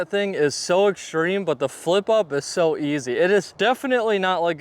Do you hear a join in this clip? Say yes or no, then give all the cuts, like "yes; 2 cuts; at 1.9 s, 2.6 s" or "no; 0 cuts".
yes; 1 cut; at 3.5 s